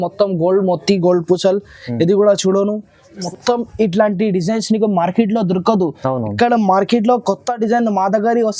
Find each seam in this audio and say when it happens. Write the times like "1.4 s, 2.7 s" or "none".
3.2 s